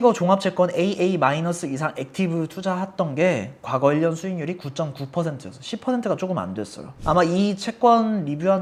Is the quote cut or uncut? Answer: uncut